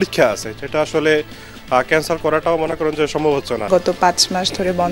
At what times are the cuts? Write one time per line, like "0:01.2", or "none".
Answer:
0:03.6